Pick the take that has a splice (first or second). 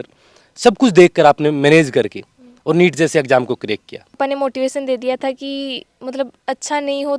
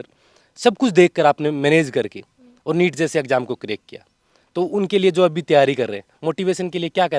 first